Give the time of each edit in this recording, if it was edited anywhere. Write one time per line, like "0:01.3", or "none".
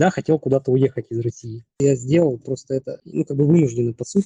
0:01.7